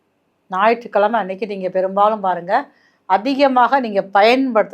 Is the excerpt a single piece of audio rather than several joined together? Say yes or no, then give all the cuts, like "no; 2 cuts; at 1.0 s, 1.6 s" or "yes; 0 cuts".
yes; 0 cuts